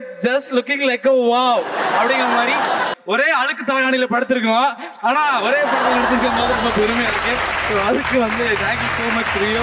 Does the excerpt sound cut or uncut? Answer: cut